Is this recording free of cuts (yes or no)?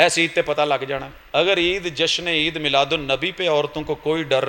no